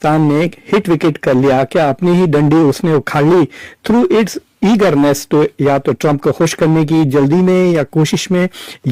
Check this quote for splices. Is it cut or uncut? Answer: uncut